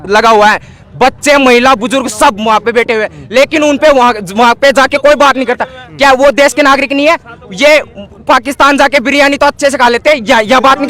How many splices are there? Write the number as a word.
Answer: zero